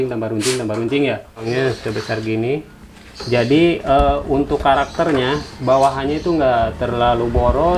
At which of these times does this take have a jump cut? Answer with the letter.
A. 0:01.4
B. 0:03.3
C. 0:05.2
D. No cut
A